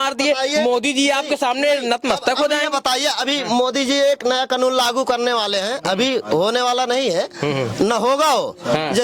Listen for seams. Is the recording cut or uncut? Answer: uncut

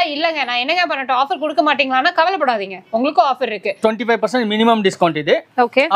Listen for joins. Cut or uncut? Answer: cut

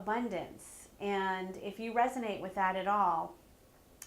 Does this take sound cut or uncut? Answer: cut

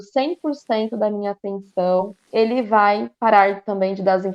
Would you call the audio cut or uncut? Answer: cut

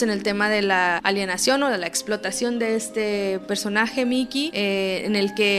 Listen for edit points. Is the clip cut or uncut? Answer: cut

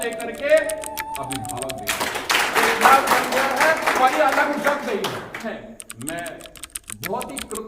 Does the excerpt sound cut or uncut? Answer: cut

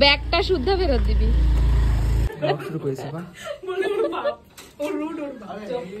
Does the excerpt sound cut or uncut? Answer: cut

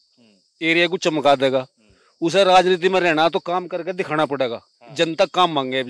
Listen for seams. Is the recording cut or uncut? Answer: uncut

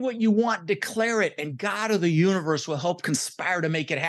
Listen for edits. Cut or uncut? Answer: uncut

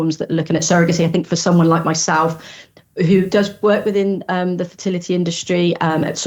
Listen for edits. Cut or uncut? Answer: uncut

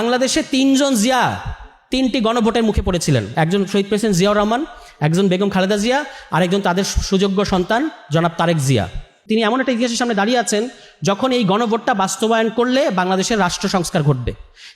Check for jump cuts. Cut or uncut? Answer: cut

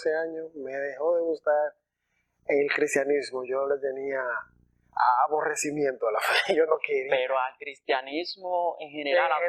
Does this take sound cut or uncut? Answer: uncut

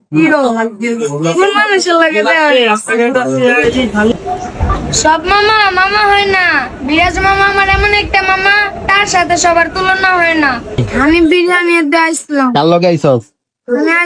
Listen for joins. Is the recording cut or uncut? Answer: cut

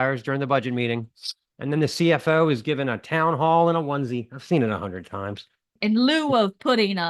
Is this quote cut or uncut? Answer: cut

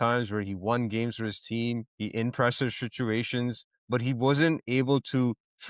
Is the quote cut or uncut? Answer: cut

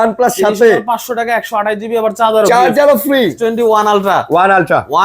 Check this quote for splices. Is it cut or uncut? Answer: cut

